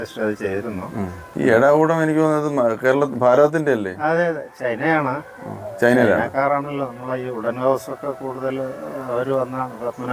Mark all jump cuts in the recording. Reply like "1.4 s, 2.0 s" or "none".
1.3 s